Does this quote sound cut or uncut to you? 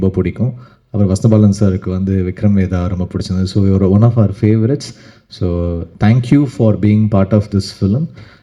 uncut